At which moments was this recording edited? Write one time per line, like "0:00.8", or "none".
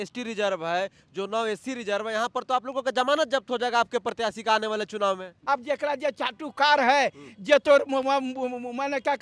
0:05.3